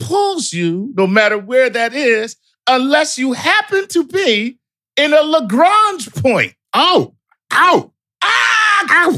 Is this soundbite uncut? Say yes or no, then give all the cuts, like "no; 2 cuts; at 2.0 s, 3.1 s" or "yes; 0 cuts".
yes; 0 cuts